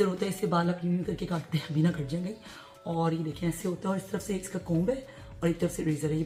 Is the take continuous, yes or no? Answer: yes